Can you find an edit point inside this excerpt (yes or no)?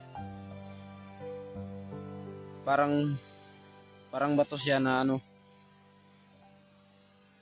yes